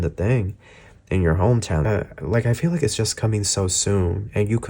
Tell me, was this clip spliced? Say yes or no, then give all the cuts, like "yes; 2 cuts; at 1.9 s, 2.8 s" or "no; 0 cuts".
yes; 1 cut; at 1.8 s